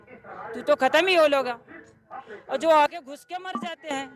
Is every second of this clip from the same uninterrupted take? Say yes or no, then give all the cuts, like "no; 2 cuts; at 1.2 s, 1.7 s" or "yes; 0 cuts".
yes; 0 cuts